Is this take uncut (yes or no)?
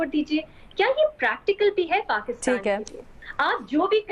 yes